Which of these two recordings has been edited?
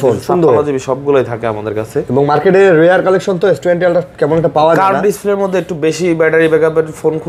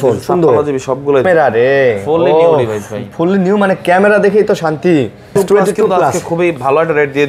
second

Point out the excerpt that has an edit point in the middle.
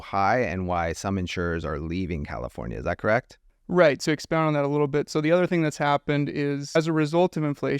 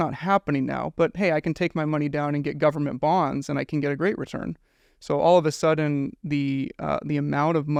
first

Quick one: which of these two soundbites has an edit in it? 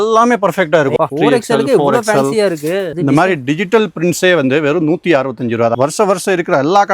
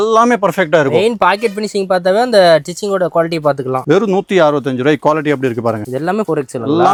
first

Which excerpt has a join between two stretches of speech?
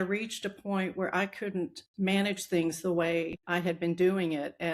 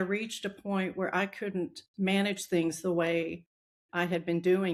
first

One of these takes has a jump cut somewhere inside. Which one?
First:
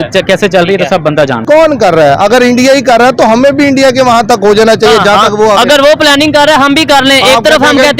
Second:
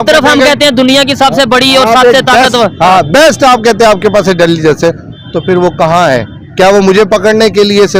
first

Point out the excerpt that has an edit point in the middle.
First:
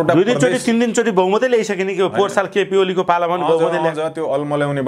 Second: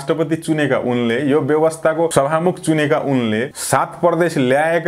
second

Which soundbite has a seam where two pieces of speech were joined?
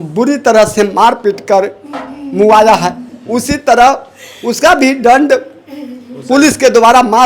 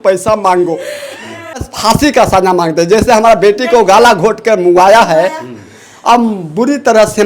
second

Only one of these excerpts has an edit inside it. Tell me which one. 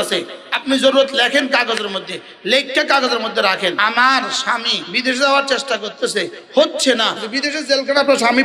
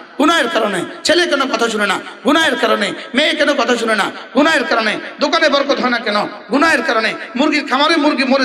first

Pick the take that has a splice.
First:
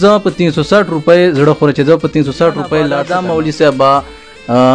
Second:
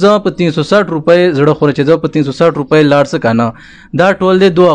first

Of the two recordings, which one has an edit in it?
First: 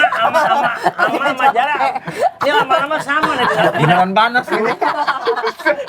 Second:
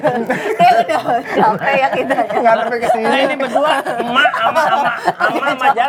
first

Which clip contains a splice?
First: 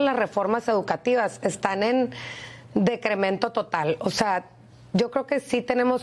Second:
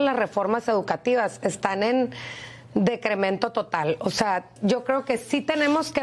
second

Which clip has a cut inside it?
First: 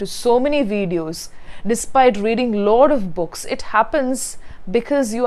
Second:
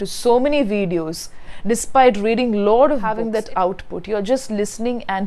second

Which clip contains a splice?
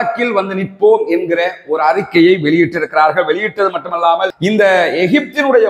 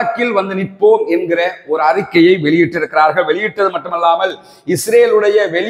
first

